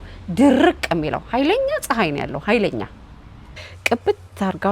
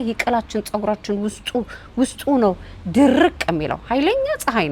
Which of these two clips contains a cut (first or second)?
first